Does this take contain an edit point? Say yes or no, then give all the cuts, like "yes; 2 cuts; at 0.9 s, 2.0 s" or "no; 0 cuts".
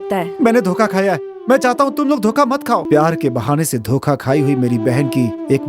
yes; 1 cut; at 2.8 s